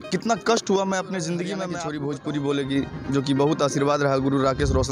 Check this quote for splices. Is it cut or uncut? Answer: cut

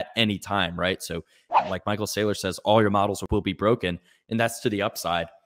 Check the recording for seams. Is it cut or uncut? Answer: cut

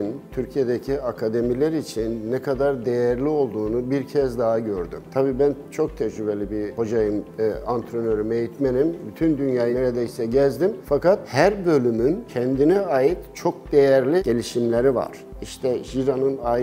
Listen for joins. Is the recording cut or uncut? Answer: uncut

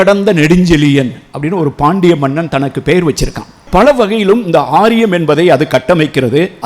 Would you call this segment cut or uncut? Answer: cut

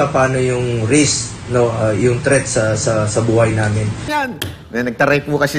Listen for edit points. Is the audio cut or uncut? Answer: cut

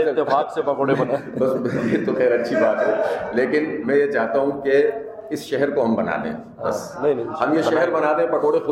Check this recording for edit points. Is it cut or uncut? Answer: uncut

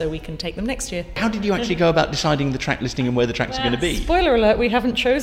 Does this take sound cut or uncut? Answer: cut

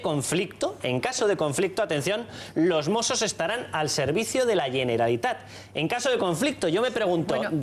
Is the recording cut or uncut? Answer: cut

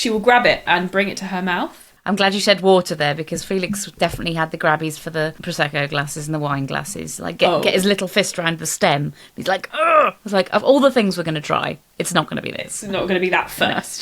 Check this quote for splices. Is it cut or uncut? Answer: cut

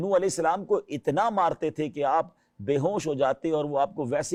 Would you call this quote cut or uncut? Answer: uncut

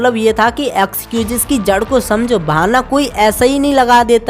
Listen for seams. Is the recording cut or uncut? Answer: uncut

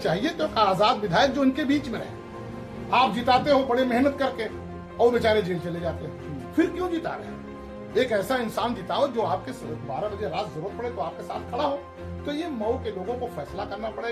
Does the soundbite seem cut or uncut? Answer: uncut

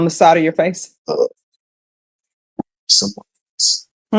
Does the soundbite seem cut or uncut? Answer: cut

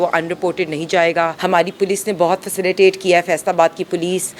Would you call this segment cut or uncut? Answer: cut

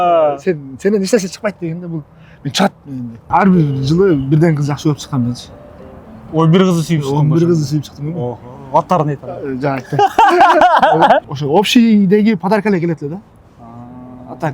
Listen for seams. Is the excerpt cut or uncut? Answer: cut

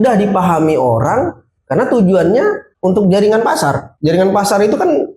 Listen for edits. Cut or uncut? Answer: cut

